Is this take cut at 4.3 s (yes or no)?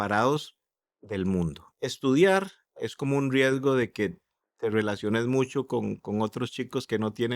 no